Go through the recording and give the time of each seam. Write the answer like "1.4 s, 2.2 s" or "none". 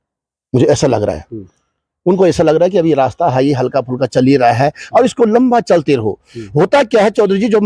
none